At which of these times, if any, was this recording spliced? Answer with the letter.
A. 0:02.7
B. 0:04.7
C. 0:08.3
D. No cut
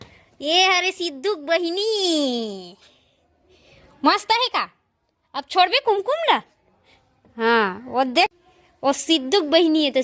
C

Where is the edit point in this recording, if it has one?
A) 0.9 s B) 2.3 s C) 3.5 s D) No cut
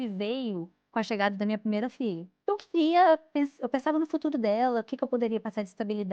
B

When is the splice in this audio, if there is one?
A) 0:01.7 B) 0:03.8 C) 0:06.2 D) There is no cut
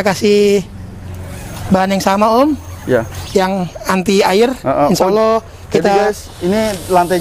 D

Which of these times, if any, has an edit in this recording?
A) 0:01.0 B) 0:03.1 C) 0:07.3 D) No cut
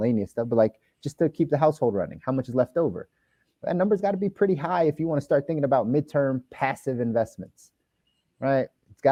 D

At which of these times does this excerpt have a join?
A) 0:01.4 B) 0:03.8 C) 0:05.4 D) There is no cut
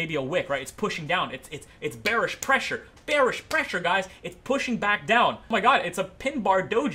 C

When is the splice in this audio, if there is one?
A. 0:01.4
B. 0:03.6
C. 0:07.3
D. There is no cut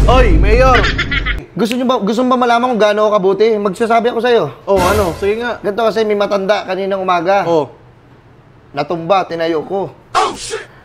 A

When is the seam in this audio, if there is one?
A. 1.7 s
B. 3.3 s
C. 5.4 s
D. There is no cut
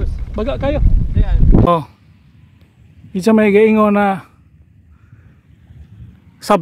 A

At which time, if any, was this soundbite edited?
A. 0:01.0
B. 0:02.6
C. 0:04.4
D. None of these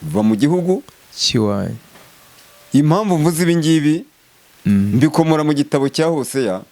D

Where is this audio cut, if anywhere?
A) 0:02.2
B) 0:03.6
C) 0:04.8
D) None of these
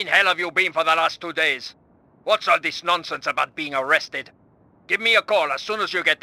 D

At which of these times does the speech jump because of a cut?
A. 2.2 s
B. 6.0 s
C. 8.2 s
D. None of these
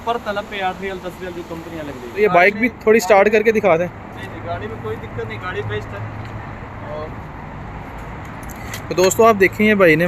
A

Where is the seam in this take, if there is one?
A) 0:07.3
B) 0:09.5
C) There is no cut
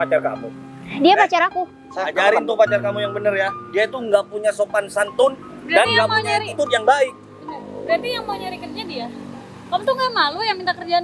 C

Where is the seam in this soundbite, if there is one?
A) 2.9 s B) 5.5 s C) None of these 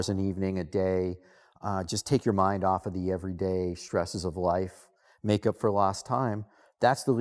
C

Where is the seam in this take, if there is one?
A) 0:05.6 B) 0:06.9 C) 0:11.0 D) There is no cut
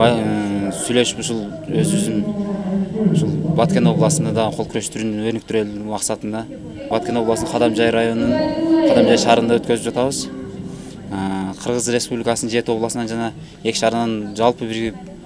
B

